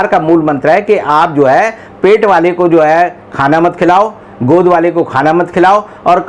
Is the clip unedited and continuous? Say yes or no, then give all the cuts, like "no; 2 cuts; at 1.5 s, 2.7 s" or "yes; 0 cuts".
yes; 0 cuts